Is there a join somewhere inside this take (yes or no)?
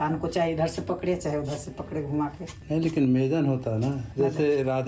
no